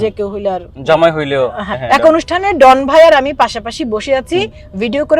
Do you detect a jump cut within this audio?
yes; 1 cut; at 1.7 s

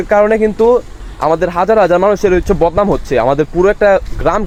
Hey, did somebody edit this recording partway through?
no; 0 cuts

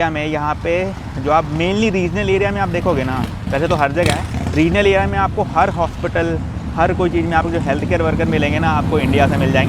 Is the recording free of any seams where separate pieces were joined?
yes; 0 cuts

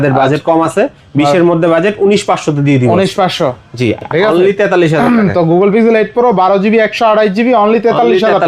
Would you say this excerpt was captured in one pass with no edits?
no; 1 cut; at 4.1 s

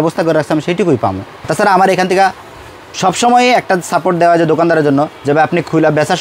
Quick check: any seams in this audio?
yes; 1 cut; at 1.5 s

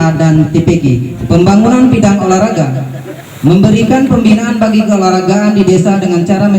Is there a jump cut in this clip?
yes; 1 cut; at 1.2 s

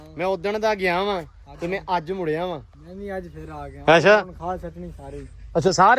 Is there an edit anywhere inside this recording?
no; 0 cuts

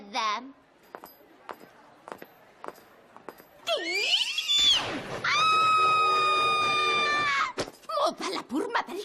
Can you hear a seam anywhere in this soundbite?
no; 0 cuts

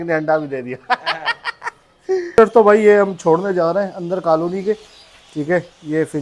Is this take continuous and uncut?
no; 1 cut; at 2.4 s

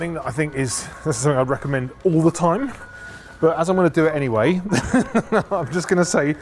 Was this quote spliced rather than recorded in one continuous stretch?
no; 0 cuts

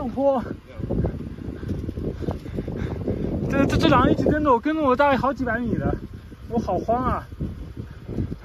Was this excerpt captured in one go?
yes; 0 cuts

